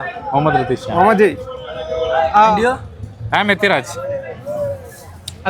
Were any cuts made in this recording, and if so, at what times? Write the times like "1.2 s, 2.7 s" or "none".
none